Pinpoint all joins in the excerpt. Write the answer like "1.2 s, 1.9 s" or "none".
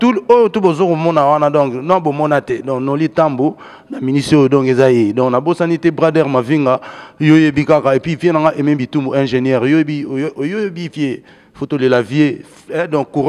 none